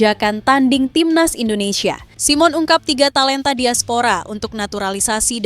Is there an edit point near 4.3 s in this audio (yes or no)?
no